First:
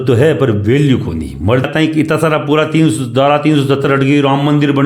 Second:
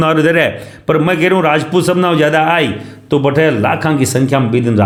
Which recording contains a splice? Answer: first; 1 cut; at 1.7 s

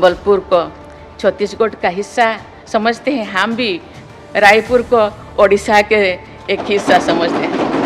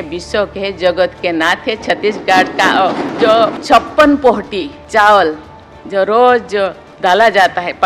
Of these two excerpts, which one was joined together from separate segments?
second; 3 cuts; at 3.2 s, 4.8 s, 6.9 s

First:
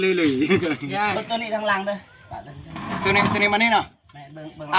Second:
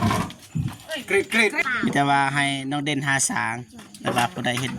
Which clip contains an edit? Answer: second; 1 cut; at 1.6 s

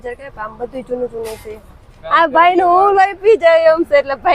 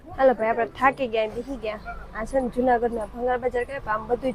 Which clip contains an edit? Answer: first; 1 cut; at 1.9 s

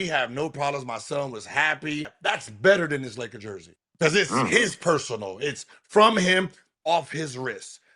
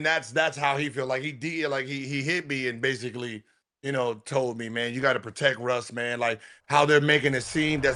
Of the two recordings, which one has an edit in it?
first; 2 cuts; at 2.1 s, 3.9 s

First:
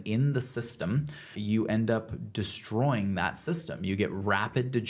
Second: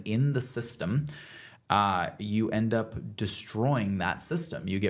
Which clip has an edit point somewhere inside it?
first; 1 cut; at 1.3 s

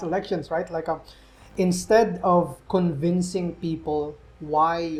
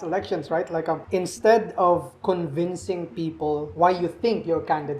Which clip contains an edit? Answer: second; 2 cuts; at 1.0 s, 3.7 s

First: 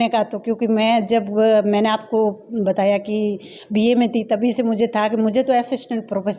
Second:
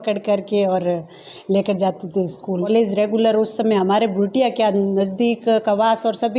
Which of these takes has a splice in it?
second; 1 cut; at 2.7 s

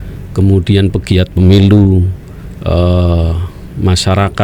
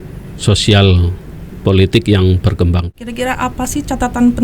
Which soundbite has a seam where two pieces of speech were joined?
second; 1 cut; at 2.9 s

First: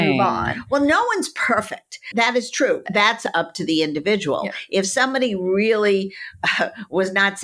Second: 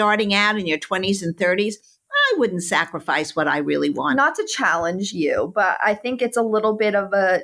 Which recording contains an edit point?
first; 1 cut; at 2.8 s

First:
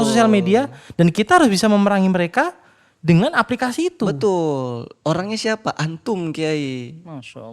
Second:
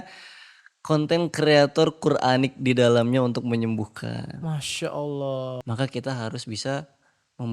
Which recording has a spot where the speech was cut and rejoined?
second; 1 cut; at 5.5 s

